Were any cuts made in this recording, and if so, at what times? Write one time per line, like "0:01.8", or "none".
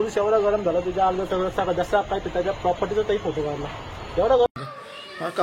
0:04.5